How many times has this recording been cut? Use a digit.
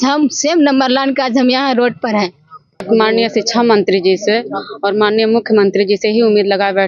1